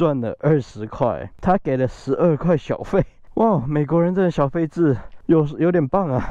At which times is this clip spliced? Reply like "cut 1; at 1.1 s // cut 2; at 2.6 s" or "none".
cut 1; at 1.3 s // cut 2; at 3.2 s // cut 3; at 5.1 s